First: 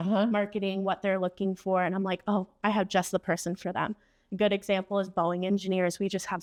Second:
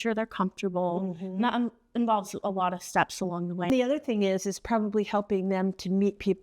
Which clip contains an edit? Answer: second; 1 cut; at 3.7 s

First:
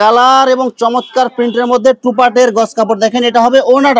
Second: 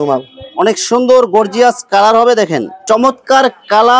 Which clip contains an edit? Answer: second; 1 cut; at 2.7 s

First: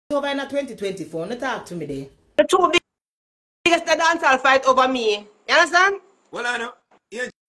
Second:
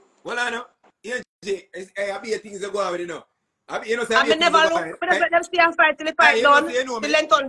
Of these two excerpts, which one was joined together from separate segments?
first; 1 cut; at 2.4 s

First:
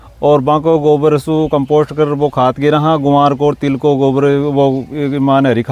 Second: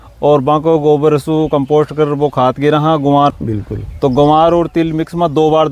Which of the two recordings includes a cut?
second; 1 cut; at 3.4 s

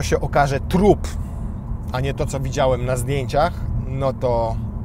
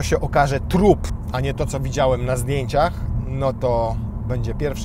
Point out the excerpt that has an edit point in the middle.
second; 1 cut; at 1.1 s

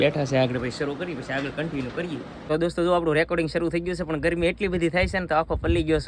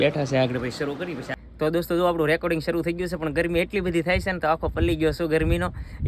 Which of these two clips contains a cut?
second; 1 cut; at 1.3 s

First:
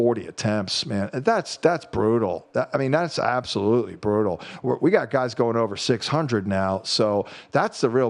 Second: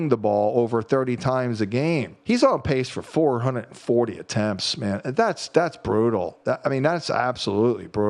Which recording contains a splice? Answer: second; 1 cut; at 2.1 s

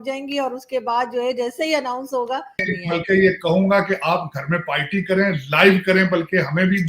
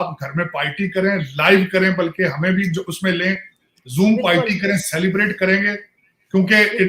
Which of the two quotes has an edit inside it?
first; 1 cut; at 2.7 s

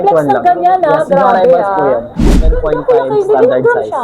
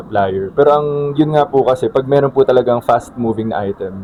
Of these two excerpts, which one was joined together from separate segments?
first; 1 cut; at 2.6 s

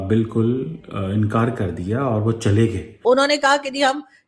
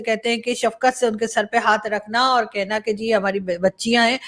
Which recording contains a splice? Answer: first; 1 cut; at 2.9 s

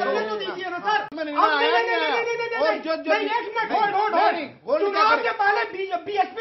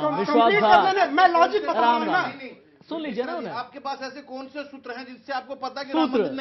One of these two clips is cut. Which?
first; 1 cut; at 1.1 s

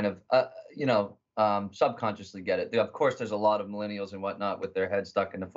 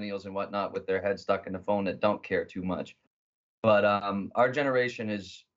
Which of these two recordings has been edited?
second; 1 cut; at 4.1 s

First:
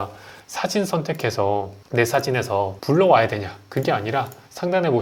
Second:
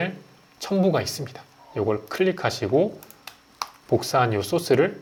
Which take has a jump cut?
first; 2 cuts; at 1.8 s, 2.8 s

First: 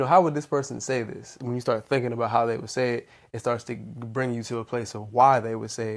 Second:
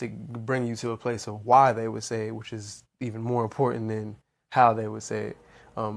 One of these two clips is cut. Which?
first; 1 cut; at 1.3 s

